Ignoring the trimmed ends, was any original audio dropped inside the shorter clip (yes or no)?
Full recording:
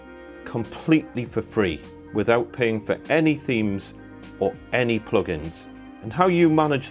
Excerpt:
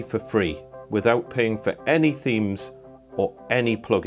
no